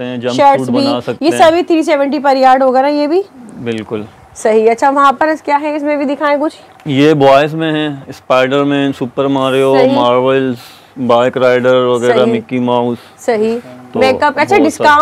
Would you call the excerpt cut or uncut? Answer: uncut